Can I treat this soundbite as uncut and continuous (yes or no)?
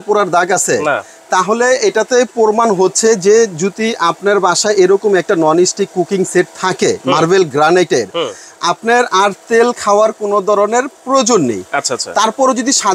yes